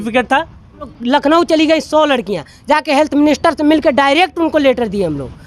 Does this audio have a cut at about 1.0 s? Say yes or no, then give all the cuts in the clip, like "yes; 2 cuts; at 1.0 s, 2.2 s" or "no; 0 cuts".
yes; 1 cut; at 1.0 s